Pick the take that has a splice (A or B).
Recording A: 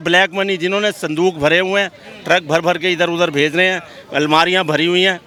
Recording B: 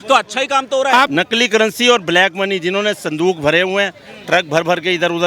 B